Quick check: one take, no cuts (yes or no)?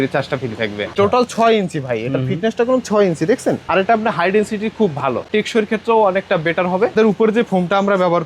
no